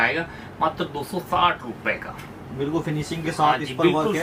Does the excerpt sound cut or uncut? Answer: uncut